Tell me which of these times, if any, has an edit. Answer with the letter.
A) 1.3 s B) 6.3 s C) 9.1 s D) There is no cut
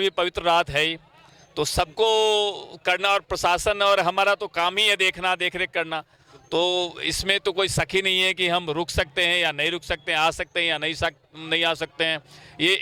D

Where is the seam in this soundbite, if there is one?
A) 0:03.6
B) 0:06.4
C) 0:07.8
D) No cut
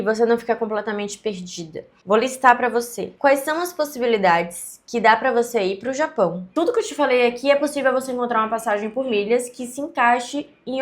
B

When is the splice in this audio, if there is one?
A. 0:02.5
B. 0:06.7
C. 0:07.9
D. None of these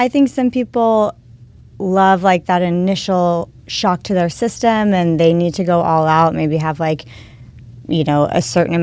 D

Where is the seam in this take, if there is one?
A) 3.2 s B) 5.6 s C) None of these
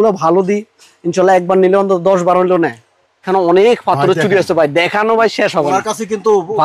A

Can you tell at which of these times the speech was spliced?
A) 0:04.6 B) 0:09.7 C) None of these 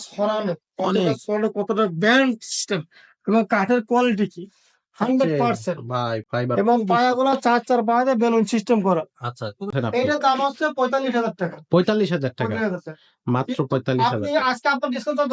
B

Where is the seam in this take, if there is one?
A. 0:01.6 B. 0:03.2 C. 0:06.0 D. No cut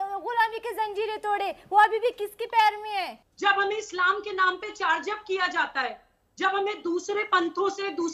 B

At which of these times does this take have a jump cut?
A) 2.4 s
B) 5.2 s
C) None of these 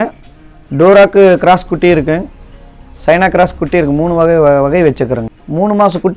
B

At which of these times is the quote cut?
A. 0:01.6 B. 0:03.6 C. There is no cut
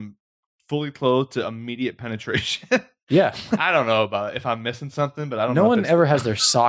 B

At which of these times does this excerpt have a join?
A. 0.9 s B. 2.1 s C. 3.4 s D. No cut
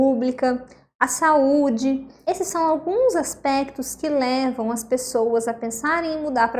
B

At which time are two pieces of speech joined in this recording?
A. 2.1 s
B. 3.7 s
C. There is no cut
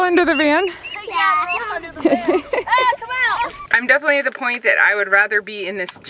B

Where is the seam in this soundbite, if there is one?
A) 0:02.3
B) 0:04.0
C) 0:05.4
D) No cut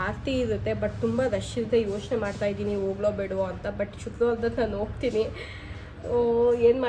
D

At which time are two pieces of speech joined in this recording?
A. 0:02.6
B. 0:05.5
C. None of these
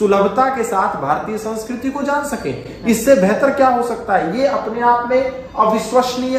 C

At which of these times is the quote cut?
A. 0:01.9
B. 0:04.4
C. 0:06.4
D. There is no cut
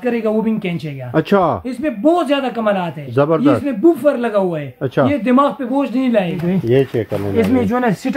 C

